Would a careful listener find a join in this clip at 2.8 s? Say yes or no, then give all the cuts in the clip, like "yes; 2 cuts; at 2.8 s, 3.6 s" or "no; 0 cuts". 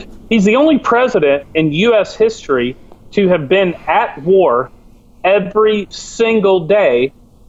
no; 0 cuts